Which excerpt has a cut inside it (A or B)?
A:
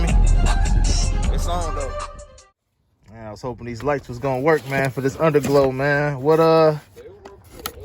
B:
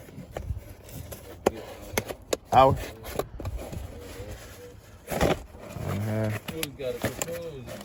A